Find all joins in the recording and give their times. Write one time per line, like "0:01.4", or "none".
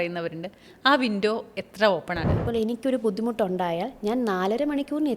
0:02.4